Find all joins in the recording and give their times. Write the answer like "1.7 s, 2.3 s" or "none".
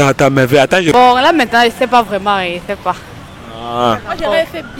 0.9 s